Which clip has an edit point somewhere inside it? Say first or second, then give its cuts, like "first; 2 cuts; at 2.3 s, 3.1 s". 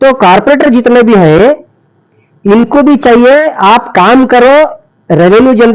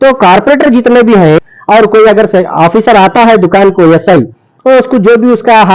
second; 1 cut; at 1.4 s